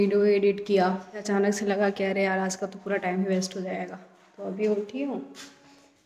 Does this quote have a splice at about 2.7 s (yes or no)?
no